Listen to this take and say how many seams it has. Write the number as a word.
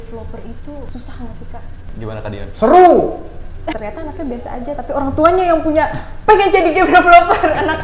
three